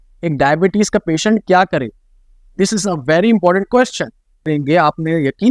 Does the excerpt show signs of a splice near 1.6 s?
no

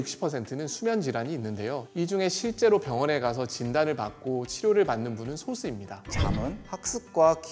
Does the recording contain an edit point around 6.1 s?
yes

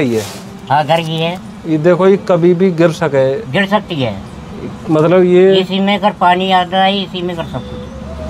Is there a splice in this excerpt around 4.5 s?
no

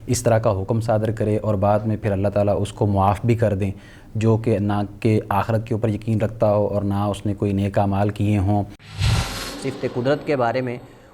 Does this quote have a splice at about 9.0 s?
yes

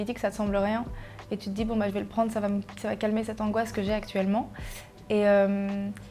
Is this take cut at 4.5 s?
no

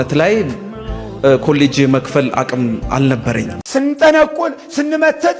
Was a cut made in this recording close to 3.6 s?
yes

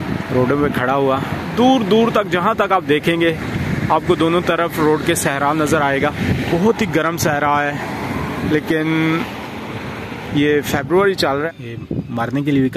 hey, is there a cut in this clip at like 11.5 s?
yes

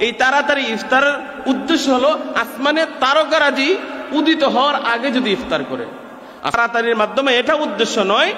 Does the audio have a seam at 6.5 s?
yes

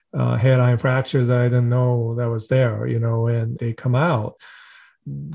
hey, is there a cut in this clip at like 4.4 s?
yes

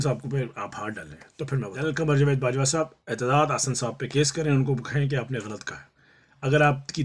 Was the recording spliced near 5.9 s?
no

